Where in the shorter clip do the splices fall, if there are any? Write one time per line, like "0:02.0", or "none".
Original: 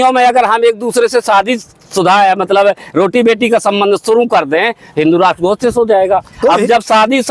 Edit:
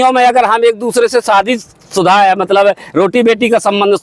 none